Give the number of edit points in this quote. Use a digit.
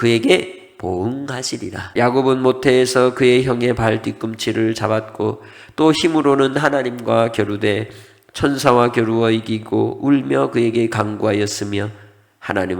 1